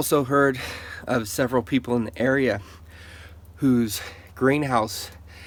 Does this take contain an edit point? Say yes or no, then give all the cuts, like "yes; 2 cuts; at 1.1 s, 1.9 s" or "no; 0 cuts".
no; 0 cuts